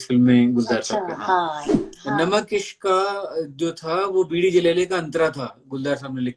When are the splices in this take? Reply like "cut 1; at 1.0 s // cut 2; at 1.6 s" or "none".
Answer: cut 1; at 1.7 s